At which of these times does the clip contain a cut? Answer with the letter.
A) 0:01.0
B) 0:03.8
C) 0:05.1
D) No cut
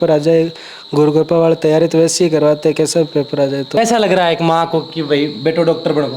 B